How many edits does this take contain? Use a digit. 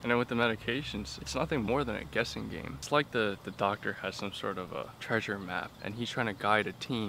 4